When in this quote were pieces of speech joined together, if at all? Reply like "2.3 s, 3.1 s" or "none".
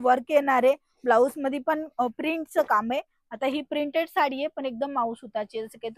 none